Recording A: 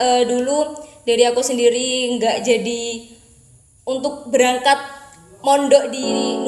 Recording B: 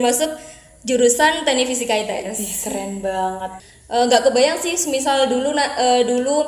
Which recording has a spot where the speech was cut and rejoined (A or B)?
B